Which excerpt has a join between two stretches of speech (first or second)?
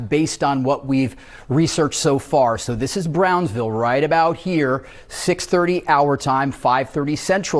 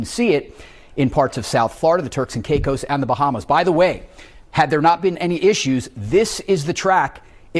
first